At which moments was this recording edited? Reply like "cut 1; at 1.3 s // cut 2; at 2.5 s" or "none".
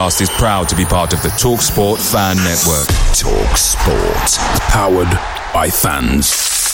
none